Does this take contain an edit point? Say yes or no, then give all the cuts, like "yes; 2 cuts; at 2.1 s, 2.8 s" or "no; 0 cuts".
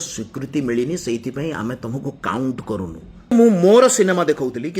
yes; 1 cut; at 3.3 s